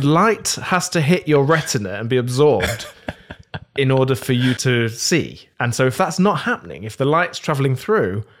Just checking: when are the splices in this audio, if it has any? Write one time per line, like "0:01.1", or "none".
0:05.1